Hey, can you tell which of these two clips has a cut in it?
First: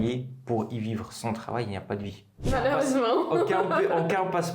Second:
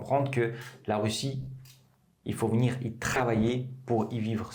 first; 1 cut; at 2.5 s

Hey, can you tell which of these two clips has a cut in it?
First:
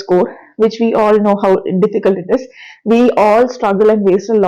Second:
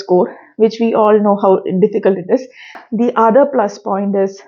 second; 1 cut; at 2.7 s

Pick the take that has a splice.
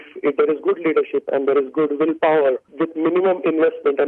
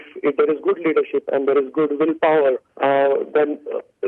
first; 1 cut; at 2.7 s

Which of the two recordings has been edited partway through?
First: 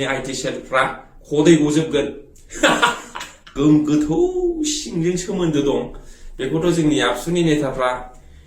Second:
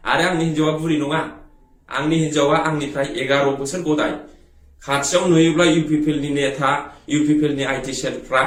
first; 1 cut; at 3.5 s

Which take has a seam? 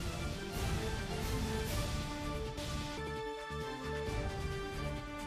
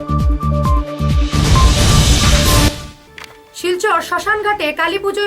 second; 1 cut; at 2.9 s

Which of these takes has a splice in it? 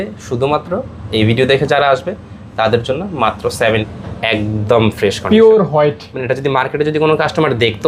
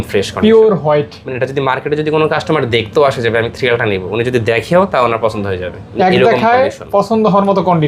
first; 1 cut; at 4.0 s

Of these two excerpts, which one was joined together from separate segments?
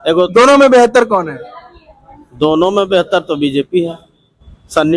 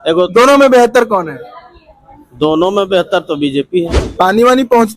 second; 1 cut; at 4.0 s

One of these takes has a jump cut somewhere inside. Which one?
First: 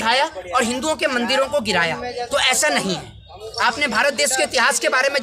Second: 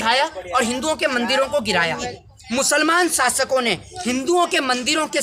second; 1 cut; at 2.2 s

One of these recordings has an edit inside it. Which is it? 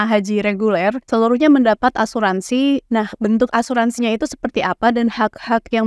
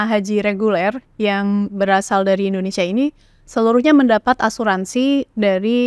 first; 2 cuts; at 1.0 s, 2.8 s

